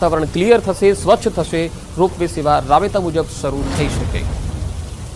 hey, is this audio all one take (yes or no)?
yes